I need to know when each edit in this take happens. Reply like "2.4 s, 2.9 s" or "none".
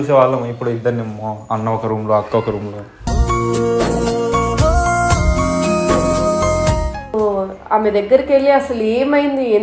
7.1 s